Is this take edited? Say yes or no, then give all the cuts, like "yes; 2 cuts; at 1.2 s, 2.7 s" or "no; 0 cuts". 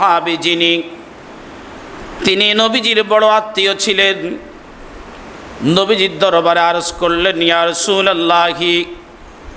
no; 0 cuts